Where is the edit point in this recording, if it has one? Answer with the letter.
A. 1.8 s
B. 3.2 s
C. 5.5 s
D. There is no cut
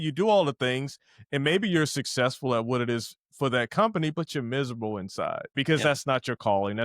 C